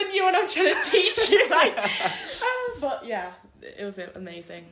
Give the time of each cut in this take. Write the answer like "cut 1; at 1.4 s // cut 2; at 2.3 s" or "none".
none